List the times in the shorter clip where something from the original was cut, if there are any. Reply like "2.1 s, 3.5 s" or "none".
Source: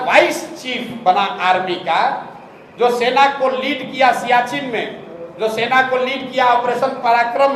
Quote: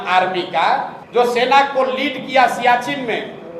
1.0 s